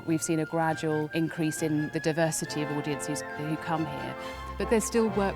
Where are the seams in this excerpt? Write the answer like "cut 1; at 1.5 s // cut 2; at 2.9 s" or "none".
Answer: cut 1; at 1.1 s // cut 2; at 4.6 s